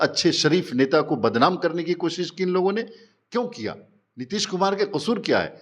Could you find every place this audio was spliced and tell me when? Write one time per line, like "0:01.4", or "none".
none

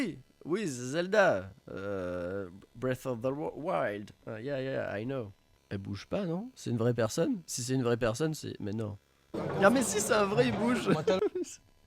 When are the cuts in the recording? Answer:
0:05.4
0:09.3

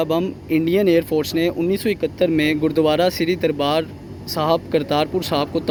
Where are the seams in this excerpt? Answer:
none

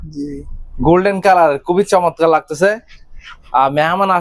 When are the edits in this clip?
none

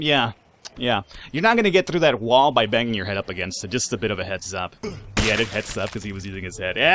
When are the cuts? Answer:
0:04.8

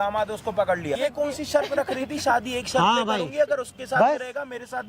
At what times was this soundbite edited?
0:00.9

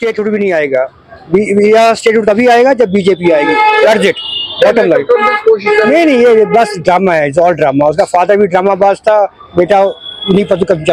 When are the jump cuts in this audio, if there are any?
none

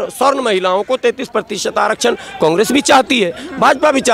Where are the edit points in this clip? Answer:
none

